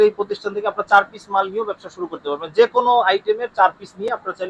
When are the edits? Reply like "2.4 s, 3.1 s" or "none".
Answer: none

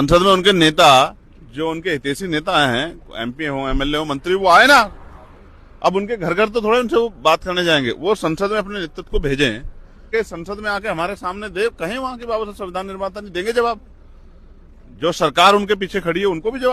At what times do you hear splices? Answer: 10.1 s

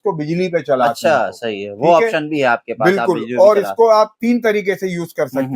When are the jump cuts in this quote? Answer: none

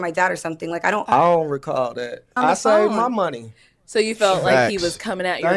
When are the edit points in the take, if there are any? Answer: 2.4 s

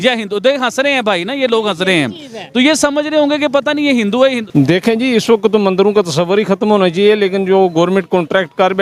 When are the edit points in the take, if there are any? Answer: 4.4 s

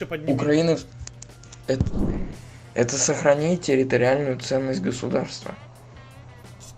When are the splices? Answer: 2.0 s

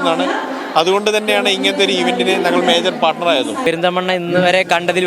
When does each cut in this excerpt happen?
3.6 s

